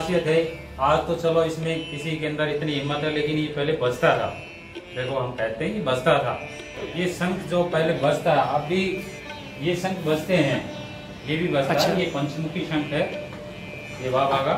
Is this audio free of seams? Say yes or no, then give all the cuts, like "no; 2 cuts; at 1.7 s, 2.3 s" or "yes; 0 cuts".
no; 1 cut; at 6.7 s